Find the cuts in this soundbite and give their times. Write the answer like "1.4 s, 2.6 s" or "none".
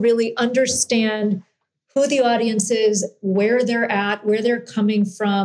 none